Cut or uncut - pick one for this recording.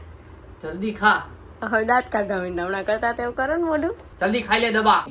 cut